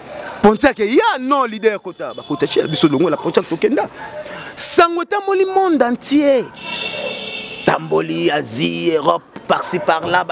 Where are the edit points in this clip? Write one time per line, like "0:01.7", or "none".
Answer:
none